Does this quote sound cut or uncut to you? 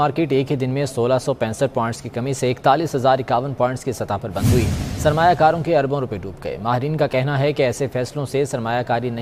uncut